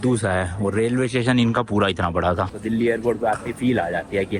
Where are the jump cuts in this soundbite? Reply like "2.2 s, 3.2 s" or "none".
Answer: 2.6 s